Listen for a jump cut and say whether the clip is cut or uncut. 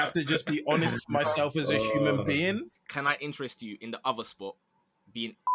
cut